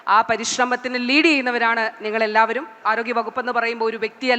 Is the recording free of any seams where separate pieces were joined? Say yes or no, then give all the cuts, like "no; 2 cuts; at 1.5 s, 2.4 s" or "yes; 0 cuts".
no; 1 cut; at 2.8 s